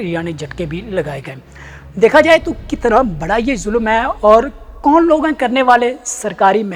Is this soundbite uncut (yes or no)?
yes